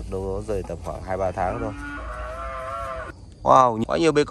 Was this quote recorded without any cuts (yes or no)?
no